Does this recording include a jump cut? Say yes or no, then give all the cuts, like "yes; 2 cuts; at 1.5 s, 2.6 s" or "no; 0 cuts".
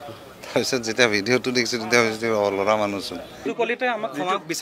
yes; 1 cut; at 3.5 s